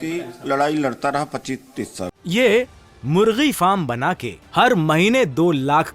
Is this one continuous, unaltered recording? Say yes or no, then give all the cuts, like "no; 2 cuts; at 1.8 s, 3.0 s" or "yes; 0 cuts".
no; 1 cut; at 2.1 s